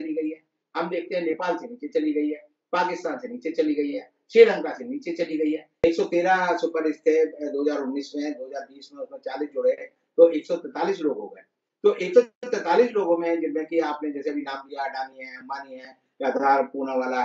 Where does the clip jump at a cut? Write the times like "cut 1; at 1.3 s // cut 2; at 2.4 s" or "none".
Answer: cut 1; at 5.8 s